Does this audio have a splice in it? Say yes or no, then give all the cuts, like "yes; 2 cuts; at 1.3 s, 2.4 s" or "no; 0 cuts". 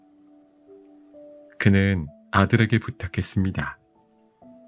yes; 1 cut; at 3.7 s